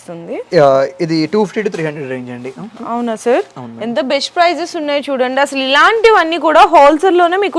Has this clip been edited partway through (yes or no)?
no